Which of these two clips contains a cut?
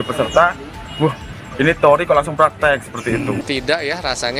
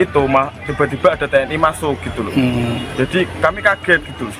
first; 1 cut; at 3.4 s

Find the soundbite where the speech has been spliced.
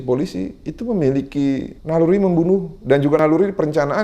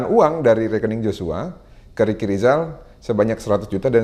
first; 2 cuts; at 1.7 s, 3.2 s

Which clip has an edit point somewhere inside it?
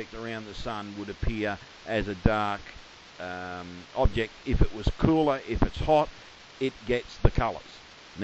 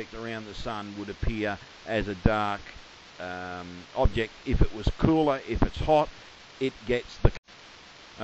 first; 1 cut; at 7.3 s

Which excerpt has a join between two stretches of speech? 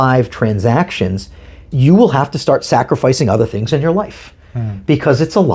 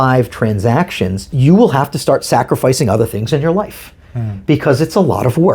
second; 1 cut; at 1.2 s

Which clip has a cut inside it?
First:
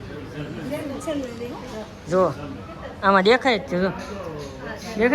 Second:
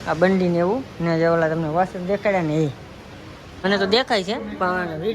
second; 1 cut; at 3.6 s

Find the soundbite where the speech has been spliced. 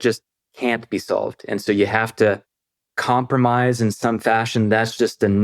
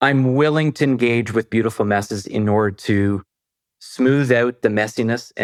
first; 1 cut; at 2.8 s

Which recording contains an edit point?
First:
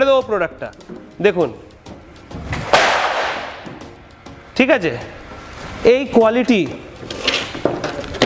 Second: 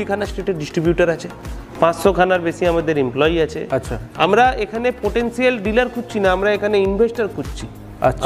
second; 1 cut; at 4.0 s

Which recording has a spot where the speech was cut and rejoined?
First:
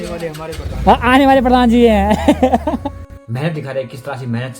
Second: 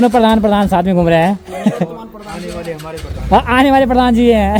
first; 1 cut; at 3.1 s

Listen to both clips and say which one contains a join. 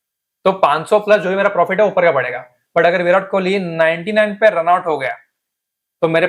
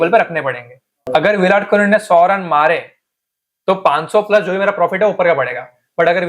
second; 1 cut; at 1.1 s

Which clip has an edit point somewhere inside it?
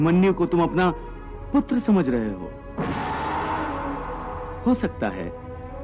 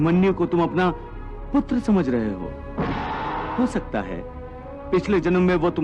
second; 1 cut; at 3.5 s

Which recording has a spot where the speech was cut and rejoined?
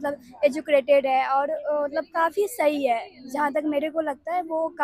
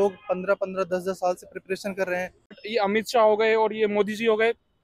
second; 1 cut; at 2.6 s

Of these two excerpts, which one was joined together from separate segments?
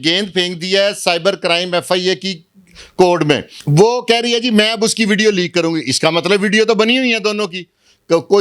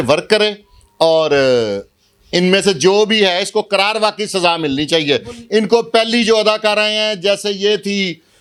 first; 1 cut; at 3.5 s

